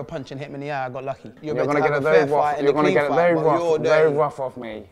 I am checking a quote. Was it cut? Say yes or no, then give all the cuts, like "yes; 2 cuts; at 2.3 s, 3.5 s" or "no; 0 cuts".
yes; 1 cut; at 1.3 s